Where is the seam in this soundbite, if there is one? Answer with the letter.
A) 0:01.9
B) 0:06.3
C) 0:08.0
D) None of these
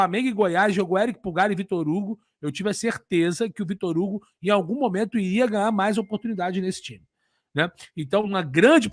D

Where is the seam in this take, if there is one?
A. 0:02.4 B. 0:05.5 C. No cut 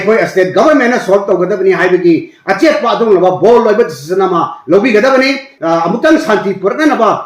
B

